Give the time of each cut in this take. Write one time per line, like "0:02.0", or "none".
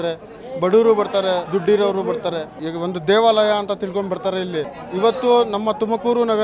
0:01.4
0:02.6
0:04.8

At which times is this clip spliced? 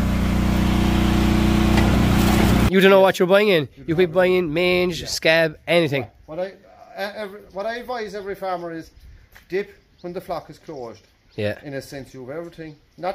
0:02.7

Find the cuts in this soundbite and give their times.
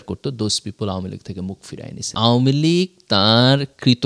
0:02.1

